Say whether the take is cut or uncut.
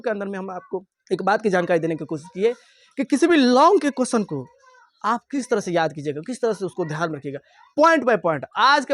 cut